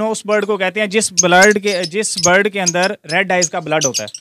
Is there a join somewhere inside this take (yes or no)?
no